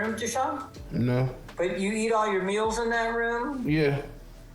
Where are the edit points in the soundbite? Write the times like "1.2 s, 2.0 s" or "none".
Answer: 1.4 s